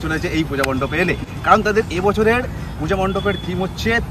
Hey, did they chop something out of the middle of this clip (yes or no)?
no